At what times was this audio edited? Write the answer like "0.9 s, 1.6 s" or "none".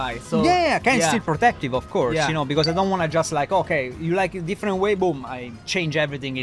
none